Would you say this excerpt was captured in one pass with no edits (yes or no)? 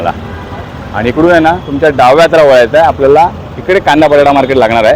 yes